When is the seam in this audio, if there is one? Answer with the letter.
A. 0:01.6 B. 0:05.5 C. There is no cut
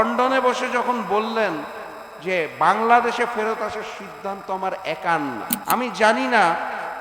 B